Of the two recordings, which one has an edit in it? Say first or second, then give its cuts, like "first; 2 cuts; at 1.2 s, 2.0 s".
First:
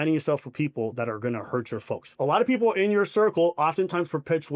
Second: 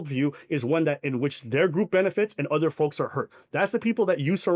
first; 1 cut; at 2.1 s